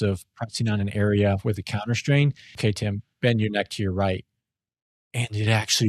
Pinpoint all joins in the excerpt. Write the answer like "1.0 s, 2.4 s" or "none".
2.5 s

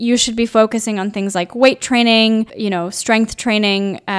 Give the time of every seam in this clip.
2.6 s

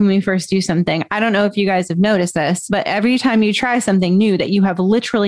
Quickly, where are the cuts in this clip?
2.6 s

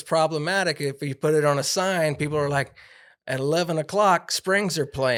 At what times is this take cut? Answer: none

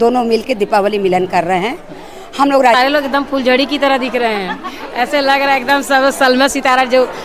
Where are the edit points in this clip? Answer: 2.8 s

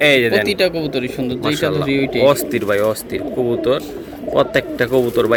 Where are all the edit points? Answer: none

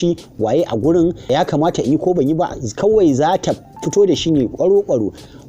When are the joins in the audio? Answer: 1.3 s

